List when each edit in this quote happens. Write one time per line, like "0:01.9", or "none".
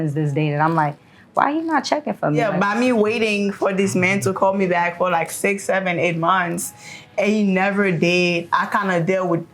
0:02.5